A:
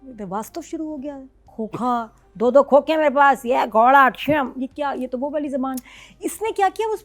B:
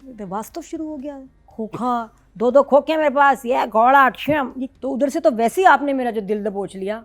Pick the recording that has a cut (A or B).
B